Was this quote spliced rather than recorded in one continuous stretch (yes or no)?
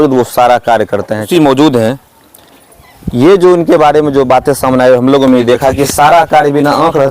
yes